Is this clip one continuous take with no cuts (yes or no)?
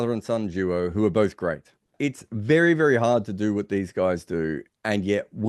no